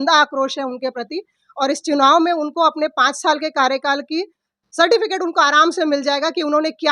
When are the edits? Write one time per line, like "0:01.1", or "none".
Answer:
none